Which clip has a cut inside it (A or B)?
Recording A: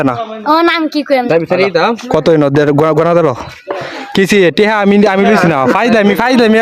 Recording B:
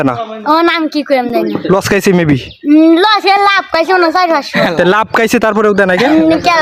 A